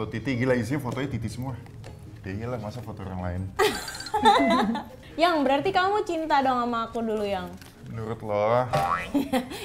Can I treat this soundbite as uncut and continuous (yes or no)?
yes